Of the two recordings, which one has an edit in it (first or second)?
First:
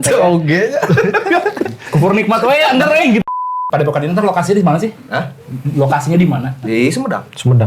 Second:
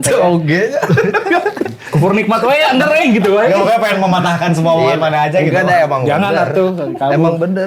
first